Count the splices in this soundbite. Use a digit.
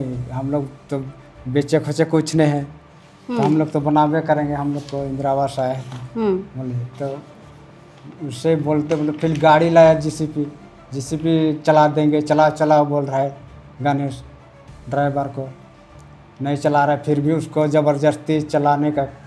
0